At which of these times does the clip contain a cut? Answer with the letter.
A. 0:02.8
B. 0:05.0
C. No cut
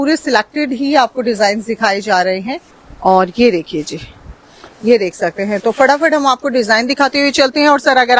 A